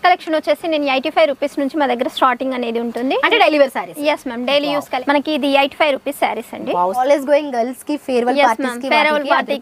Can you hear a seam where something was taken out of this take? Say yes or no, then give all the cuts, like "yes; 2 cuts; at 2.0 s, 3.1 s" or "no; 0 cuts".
yes; 2 cuts; at 4.9 s, 7.0 s